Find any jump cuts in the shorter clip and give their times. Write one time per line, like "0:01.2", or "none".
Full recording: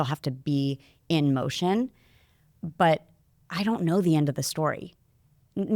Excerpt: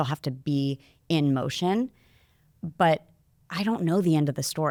none